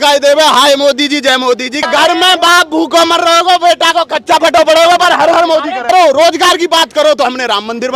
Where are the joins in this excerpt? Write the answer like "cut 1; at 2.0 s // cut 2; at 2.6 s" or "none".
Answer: cut 1; at 1.8 s // cut 2; at 5.9 s